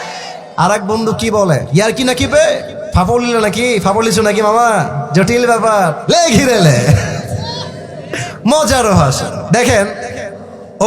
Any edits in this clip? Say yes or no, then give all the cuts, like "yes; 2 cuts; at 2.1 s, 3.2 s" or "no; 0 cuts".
yes; 4 cuts; at 1.7 s, 2.8 s, 6.0 s, 9.3 s